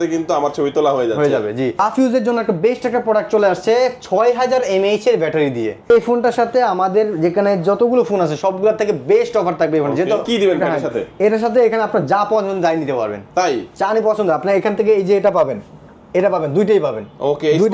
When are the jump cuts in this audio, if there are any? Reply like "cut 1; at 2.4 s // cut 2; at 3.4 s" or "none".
cut 1; at 1.8 s // cut 2; at 5.9 s // cut 3; at 10.2 s